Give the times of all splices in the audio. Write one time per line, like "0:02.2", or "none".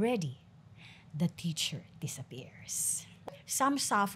0:03.2